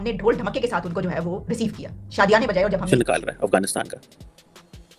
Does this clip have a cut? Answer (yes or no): yes